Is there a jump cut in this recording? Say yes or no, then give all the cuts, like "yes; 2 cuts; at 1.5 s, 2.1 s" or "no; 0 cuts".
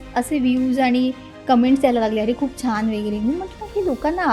no; 0 cuts